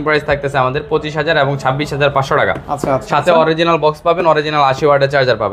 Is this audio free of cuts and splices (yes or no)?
yes